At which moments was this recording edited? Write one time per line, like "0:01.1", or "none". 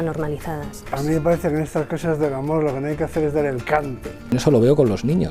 0:00.9
0:04.3